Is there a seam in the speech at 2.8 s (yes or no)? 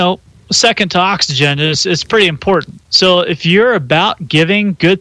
yes